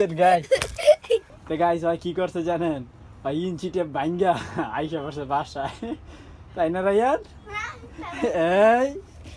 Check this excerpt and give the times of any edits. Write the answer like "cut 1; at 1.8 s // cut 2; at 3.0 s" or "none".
cut 1; at 1.3 s